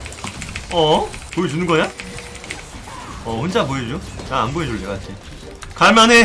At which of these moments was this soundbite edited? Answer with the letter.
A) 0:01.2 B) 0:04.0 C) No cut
A